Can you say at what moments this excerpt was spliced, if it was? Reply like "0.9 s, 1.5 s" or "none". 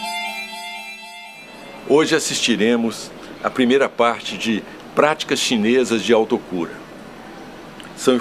1.1 s